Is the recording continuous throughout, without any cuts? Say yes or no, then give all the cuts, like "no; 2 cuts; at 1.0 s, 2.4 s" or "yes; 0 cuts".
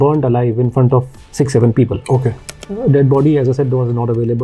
no; 2 cuts; at 1.2 s, 2.5 s